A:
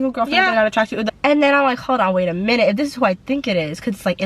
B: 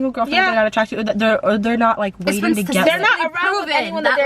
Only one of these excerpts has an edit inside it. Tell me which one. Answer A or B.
A